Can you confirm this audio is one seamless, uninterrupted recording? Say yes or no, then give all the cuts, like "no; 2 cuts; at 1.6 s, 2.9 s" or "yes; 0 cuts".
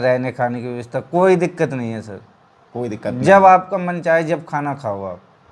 yes; 0 cuts